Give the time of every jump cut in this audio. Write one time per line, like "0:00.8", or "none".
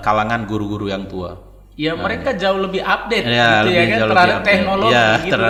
none